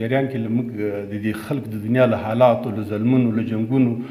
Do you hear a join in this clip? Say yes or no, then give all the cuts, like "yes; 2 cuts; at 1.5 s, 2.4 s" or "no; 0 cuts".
no; 0 cuts